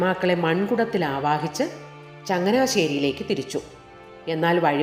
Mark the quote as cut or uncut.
uncut